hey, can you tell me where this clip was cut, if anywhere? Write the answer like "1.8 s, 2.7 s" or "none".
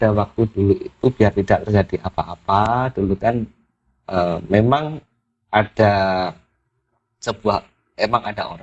none